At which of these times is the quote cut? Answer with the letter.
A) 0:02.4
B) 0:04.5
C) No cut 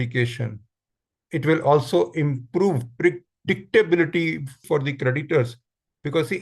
B